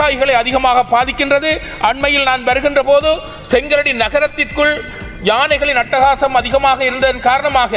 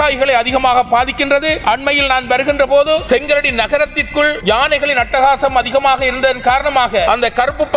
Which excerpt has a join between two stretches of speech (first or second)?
second